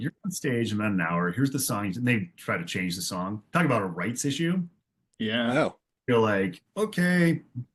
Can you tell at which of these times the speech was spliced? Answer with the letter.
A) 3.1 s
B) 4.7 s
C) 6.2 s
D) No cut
D